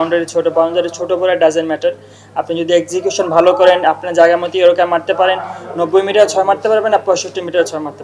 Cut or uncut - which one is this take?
uncut